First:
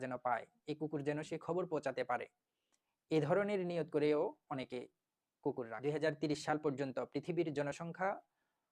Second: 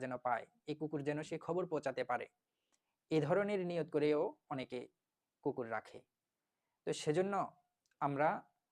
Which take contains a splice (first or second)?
first